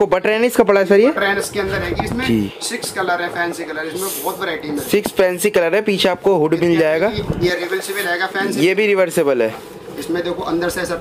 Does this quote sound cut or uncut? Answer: uncut